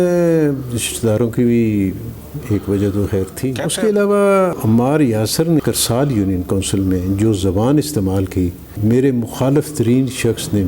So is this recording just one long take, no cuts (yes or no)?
no